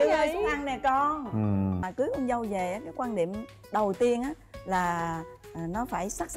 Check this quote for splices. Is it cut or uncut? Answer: cut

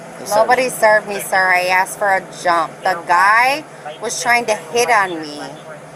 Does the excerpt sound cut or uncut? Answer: uncut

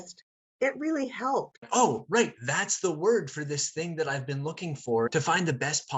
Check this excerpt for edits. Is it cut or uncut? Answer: cut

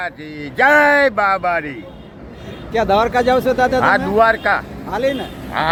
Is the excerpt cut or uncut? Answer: uncut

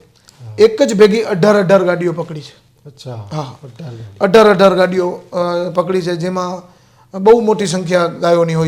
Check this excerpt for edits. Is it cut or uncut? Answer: uncut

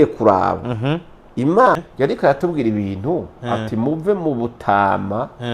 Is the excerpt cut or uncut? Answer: cut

